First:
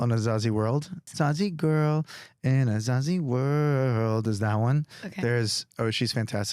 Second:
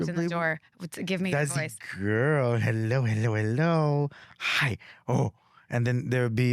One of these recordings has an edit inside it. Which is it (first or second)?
first